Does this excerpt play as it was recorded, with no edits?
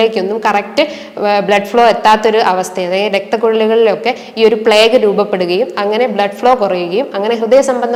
yes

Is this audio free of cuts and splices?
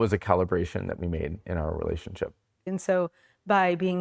no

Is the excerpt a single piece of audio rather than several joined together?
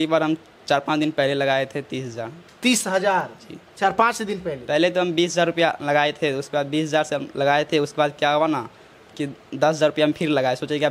yes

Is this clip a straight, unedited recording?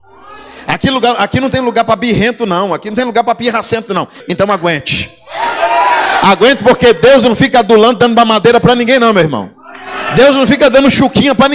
no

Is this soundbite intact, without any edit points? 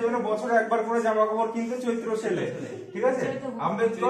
yes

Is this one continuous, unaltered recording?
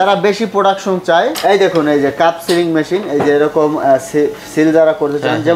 no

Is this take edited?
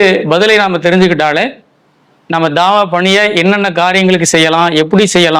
no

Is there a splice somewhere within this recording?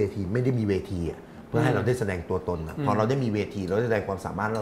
no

